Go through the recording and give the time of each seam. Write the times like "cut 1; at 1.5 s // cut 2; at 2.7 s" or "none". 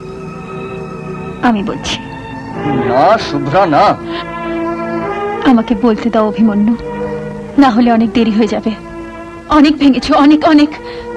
none